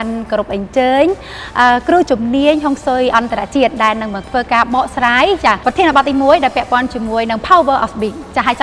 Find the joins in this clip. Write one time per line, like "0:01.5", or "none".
0:05.6